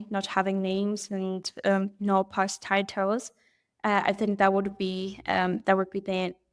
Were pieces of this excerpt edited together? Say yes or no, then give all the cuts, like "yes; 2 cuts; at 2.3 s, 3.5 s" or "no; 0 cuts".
no; 0 cuts